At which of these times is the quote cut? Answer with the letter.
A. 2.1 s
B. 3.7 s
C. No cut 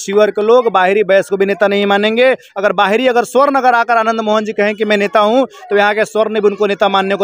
C